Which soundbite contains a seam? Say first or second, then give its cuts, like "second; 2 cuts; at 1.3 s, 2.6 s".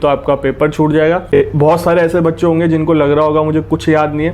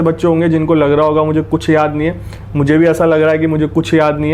first; 1 cut; at 1.3 s